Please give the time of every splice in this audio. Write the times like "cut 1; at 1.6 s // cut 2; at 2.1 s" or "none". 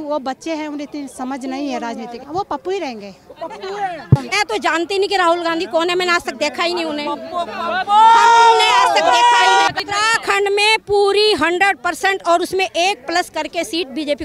cut 1; at 2.2 s // cut 2; at 4.3 s // cut 3; at 9.7 s

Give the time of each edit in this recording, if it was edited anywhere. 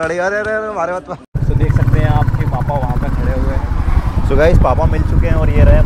cut 1; at 1.2 s

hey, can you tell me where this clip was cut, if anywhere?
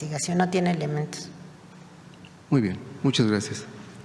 none

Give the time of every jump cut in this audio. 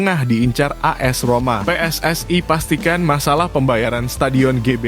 cut 1; at 1.6 s

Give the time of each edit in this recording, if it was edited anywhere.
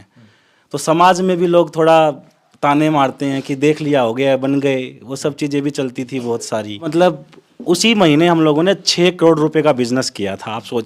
cut 1; at 6.9 s

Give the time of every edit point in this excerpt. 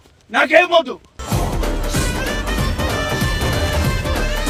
none

